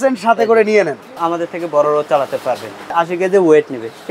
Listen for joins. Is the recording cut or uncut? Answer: cut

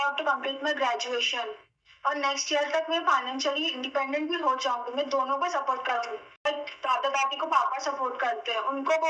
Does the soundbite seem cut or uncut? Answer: cut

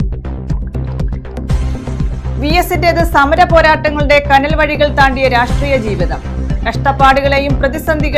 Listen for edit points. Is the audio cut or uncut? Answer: uncut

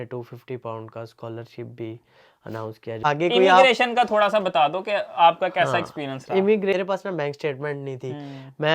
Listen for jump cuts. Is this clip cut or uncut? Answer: cut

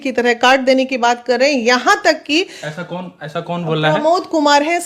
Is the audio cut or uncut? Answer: uncut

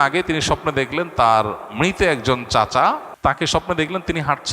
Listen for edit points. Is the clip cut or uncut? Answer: cut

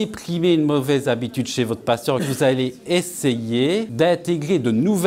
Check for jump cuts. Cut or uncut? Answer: cut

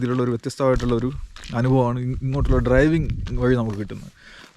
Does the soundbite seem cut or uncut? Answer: uncut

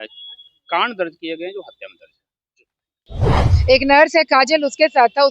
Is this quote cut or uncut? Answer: cut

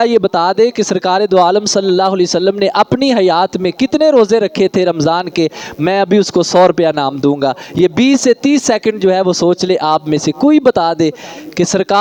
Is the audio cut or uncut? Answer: uncut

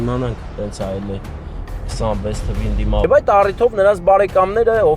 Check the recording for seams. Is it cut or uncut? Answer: cut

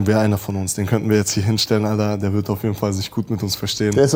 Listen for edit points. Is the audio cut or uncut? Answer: uncut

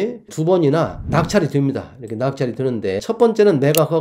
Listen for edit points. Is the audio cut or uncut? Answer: cut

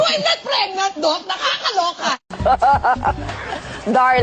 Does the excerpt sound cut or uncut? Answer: cut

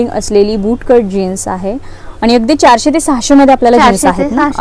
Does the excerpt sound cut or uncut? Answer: uncut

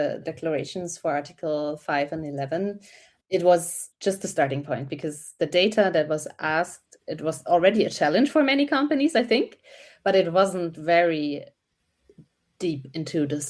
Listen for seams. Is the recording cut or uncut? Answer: cut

